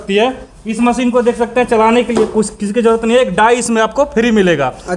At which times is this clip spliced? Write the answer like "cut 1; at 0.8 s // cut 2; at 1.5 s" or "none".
none